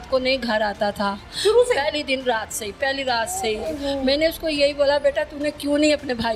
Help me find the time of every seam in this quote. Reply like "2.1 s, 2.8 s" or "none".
none